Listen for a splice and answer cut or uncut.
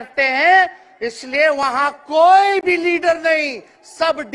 uncut